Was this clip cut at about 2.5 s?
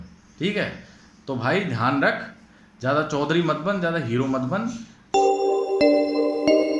no; 1 cut; at 4.9 s

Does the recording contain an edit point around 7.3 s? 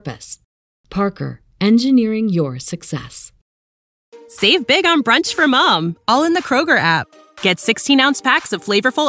no; 1 cut; at 4.0 s

